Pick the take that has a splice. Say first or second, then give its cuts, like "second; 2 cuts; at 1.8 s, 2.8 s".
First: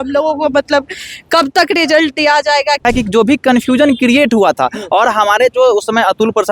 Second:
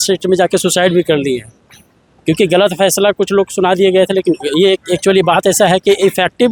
first; 1 cut; at 2.8 s